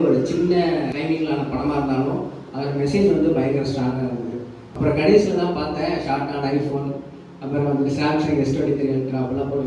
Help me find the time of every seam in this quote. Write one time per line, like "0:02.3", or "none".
0:00.9
0:04.7